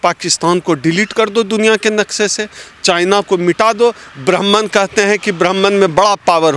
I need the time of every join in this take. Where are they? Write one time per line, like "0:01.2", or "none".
none